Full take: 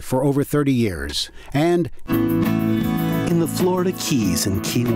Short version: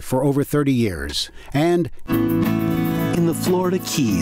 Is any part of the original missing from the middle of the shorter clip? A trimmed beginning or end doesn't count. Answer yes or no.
yes